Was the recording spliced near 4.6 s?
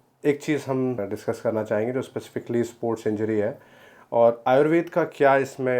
no; 1 cut; at 1.0 s

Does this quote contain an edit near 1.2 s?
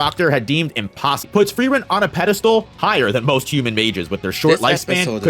yes; 1 cut; at 1.2 s

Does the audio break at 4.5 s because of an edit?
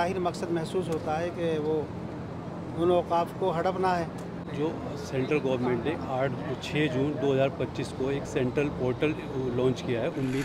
yes; 1 cut; at 4.5 s

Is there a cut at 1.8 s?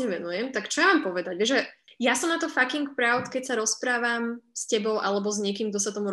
yes; 1 cut; at 1.8 s

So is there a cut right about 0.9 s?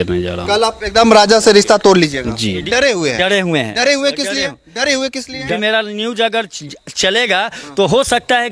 no; 2 cuts; at 2.6 s, 5.5 s

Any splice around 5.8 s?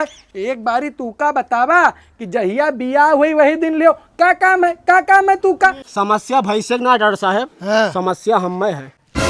yes; 1 cut; at 5.8 s

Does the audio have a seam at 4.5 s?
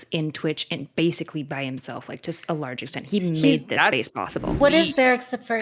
yes; 1 cut; at 4.5 s

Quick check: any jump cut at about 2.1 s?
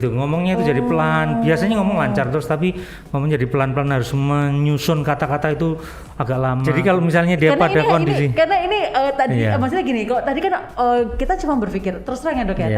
no; 1 cut; at 6.7 s

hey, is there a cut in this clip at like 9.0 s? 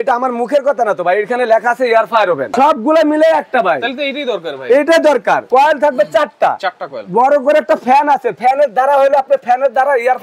no; 2 cuts; at 2.5 s, 5.4 s

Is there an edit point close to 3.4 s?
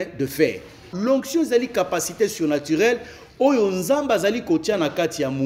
no; 1 cut; at 0.9 s

